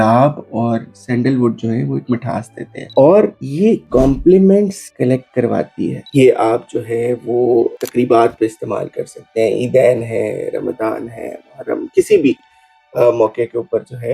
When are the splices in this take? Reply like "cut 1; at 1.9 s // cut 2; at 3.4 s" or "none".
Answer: cut 1; at 2.9 s // cut 2; at 6.0 s